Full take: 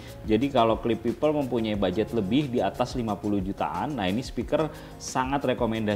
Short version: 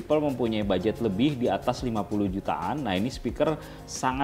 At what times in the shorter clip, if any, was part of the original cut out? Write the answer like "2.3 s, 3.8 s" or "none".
none

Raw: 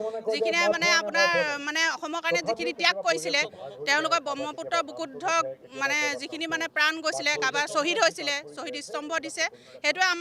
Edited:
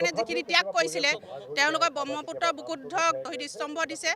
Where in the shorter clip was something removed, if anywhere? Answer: 3.3 s

